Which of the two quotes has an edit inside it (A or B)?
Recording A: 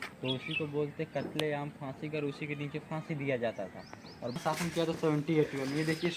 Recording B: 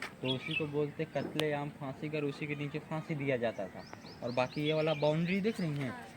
A